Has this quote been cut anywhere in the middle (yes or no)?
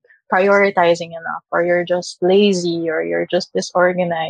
no